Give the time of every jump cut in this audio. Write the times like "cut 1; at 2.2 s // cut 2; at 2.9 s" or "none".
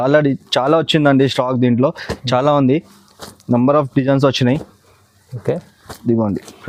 none